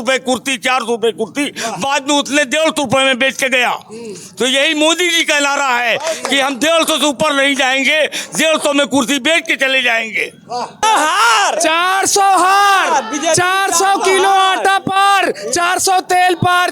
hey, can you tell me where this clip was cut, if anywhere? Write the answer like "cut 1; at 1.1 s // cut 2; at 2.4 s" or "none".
cut 1; at 10.8 s

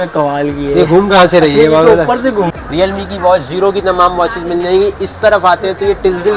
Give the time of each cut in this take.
cut 1; at 2.5 s

